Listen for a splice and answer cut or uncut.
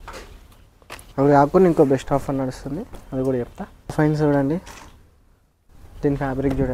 cut